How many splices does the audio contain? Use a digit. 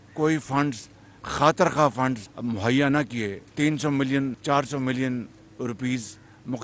3